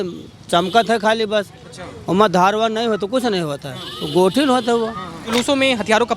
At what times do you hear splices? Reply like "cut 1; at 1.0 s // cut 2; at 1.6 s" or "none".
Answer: cut 1; at 5.3 s